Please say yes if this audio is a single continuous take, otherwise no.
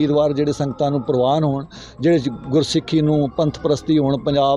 yes